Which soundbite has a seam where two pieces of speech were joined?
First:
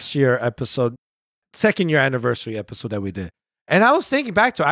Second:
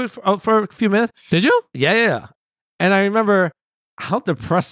second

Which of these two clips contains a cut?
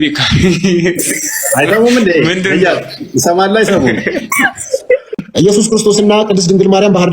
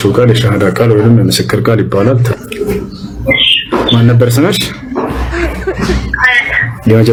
first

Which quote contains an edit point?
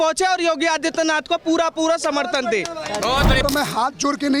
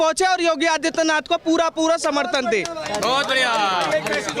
first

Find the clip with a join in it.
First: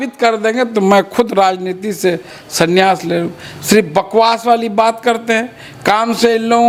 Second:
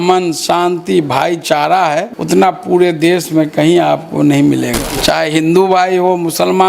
second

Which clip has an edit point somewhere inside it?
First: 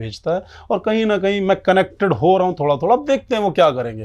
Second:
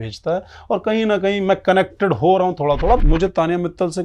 second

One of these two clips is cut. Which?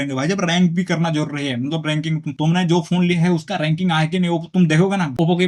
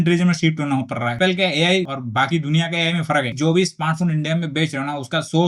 second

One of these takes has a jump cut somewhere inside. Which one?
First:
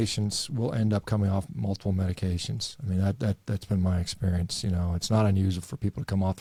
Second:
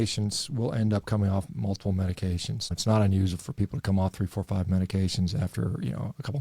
second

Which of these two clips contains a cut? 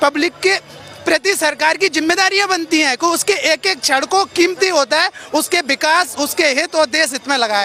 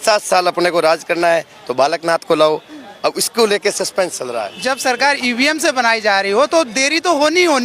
second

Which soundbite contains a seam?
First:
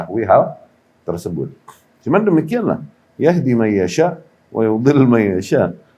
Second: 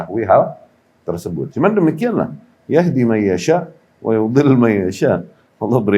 second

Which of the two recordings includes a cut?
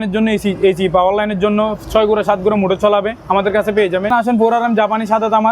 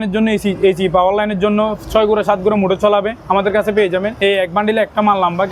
first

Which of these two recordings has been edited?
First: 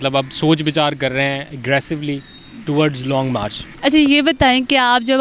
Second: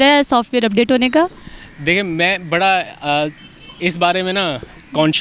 first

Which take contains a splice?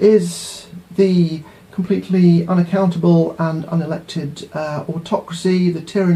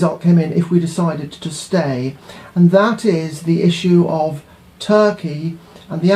second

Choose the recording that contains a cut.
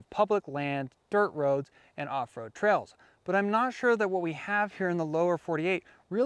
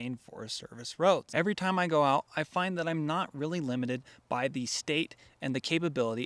second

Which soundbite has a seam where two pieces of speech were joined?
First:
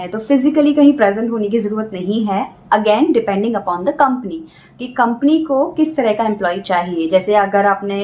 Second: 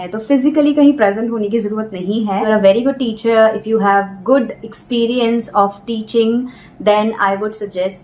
second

